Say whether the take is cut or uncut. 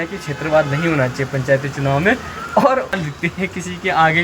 cut